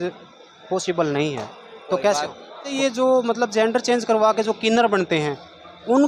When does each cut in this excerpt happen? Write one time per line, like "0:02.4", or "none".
0:02.7